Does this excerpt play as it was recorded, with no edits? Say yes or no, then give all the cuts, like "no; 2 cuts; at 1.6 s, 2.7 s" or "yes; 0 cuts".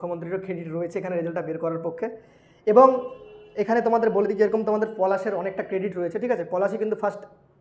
yes; 0 cuts